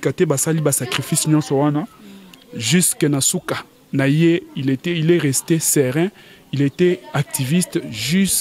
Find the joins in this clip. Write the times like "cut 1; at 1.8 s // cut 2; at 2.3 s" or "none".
none